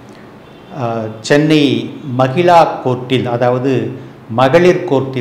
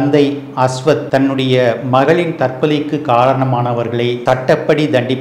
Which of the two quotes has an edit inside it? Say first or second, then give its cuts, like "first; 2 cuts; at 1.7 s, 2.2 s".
second; 2 cuts; at 1.0 s, 4.2 s